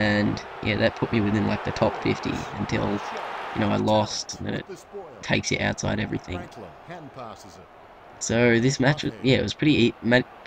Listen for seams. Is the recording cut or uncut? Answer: uncut